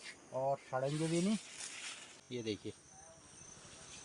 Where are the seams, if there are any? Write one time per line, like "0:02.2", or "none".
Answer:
0:02.2